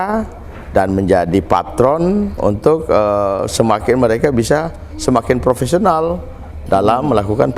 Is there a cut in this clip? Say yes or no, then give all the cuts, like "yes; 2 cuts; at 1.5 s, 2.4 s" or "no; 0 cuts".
no; 0 cuts